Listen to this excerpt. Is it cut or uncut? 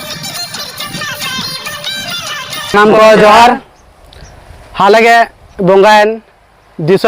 cut